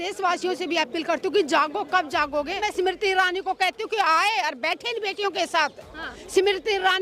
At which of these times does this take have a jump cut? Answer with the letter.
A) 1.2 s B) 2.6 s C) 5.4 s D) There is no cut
B